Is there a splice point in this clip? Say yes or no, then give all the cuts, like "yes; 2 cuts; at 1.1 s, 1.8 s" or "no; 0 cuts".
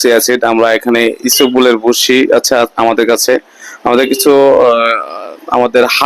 no; 0 cuts